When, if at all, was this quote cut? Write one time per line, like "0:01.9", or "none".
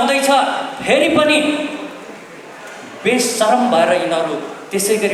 none